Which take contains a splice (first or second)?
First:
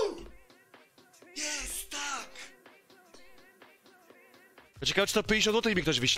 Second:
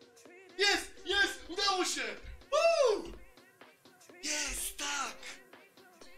first